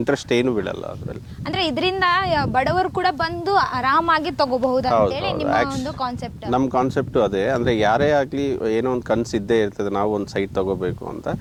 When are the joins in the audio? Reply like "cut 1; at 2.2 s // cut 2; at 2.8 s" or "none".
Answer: none